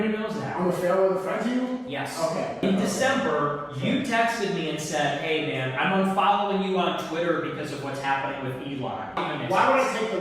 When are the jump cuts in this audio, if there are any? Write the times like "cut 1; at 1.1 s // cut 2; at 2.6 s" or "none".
cut 1; at 2.6 s // cut 2; at 9.2 s